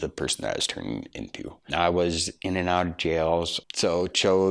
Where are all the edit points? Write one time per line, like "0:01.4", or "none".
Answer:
0:01.5
0:03.6